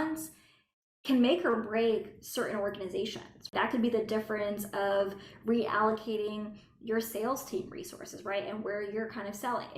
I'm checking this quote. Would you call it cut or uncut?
cut